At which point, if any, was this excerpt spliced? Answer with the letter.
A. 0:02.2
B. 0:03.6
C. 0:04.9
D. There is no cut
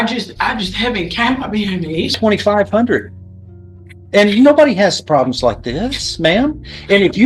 A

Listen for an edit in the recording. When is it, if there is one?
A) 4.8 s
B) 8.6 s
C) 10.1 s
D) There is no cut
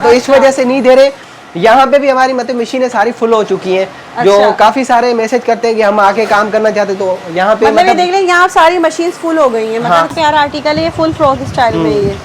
C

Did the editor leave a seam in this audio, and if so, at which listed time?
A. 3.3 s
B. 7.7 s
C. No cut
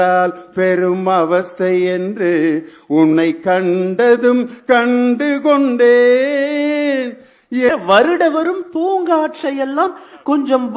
B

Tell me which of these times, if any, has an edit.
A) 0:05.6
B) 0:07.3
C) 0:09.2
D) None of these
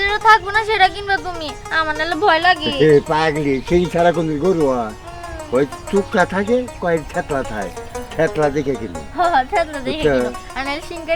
D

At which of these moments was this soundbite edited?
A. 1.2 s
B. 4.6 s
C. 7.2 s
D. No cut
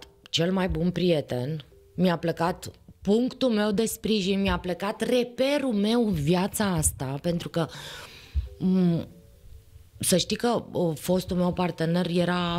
D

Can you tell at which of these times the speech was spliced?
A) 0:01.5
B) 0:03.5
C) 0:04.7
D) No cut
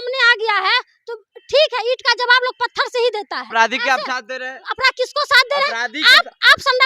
B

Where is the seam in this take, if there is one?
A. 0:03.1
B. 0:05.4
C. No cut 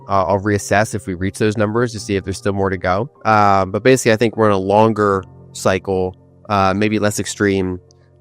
A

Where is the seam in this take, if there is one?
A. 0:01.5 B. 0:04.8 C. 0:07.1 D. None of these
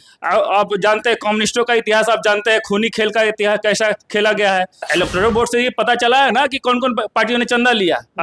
B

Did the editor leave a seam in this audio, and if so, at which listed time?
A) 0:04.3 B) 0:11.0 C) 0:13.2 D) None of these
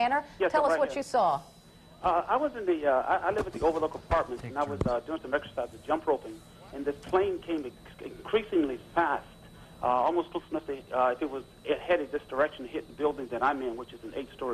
B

